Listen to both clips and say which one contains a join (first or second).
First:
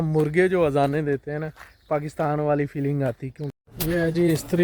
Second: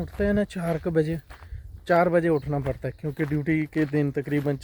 first